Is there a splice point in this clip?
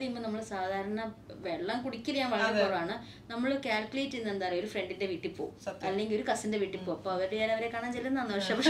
no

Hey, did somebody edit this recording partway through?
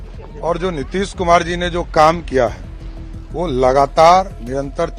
no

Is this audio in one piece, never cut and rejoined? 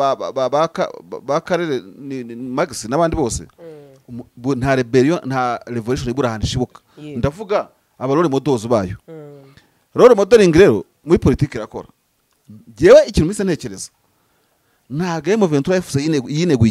yes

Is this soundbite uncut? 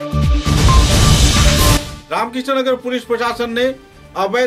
no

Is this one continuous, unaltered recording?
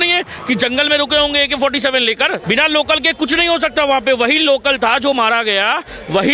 no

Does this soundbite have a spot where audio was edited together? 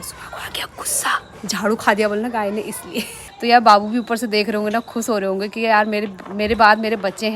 yes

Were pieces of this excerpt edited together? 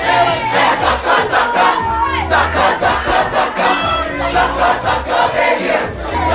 no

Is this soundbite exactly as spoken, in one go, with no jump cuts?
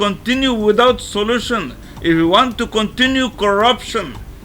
yes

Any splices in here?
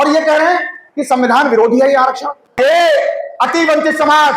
yes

